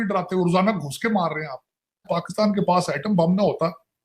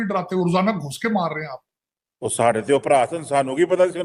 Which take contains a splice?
first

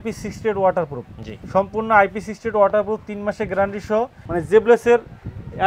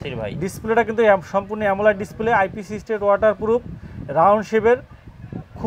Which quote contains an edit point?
first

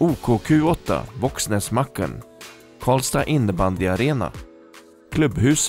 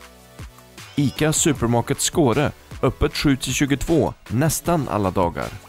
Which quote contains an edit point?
second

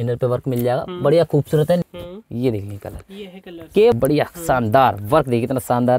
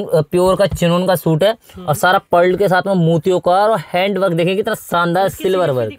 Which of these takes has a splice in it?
first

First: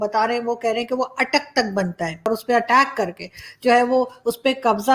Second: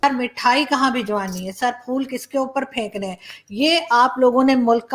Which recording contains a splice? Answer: first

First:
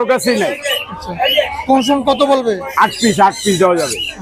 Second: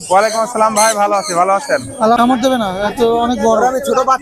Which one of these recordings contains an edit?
second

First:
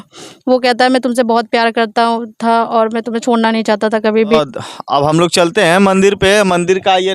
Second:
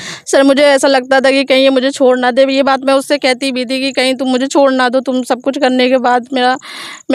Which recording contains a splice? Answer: first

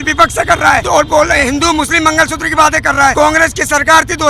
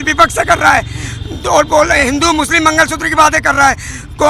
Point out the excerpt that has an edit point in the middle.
first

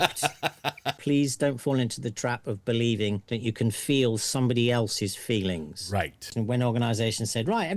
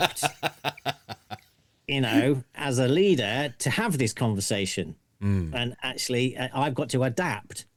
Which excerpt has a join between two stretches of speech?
first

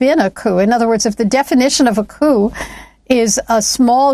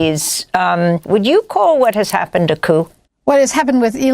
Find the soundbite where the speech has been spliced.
second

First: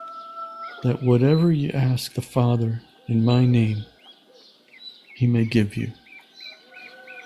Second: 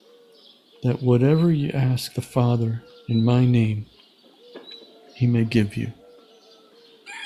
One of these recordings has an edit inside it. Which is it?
first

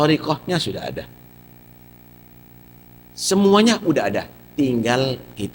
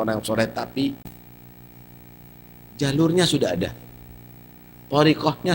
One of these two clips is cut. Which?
second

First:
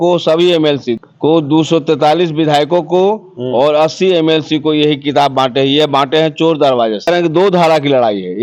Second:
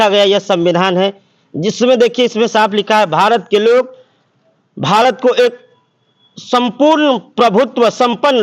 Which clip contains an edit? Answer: first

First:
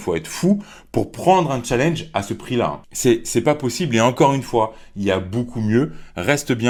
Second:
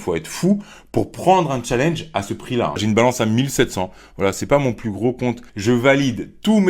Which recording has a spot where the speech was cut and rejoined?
second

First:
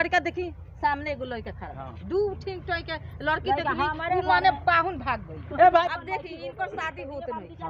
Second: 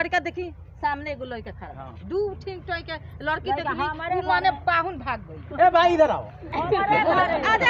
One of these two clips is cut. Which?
first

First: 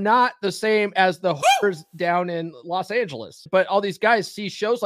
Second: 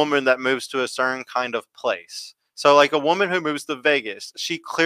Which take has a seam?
first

